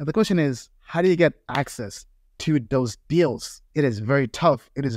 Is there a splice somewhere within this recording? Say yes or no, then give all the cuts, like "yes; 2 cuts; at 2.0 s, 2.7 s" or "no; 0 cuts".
no; 0 cuts